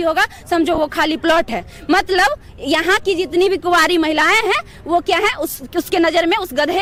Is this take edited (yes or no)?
no